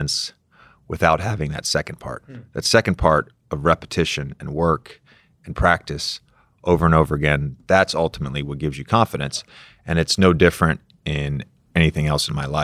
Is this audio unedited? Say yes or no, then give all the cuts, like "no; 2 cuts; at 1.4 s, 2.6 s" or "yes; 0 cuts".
no; 1 cut; at 11.7 s